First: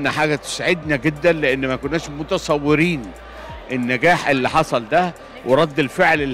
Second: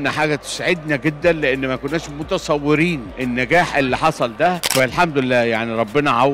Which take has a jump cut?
second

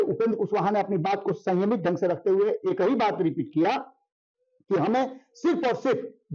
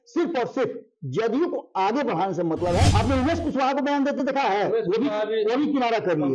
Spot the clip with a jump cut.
second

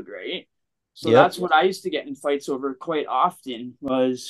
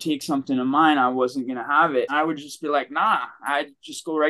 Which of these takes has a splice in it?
second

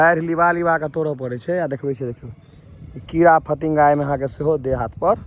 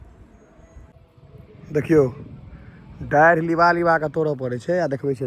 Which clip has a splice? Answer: second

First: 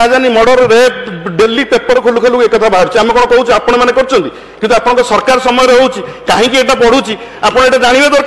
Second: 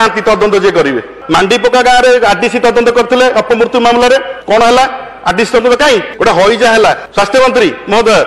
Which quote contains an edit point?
second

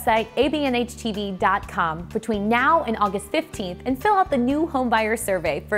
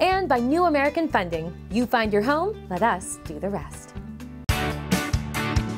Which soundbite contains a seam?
second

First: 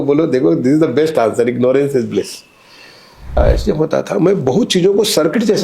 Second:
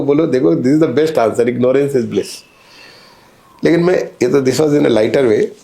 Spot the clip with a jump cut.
first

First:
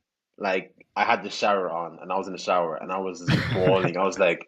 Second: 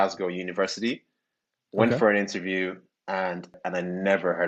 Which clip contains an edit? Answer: second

